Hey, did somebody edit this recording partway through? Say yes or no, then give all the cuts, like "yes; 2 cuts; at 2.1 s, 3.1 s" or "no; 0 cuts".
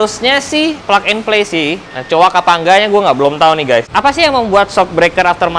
yes; 3 cuts; at 0.8 s, 1.9 s, 3.9 s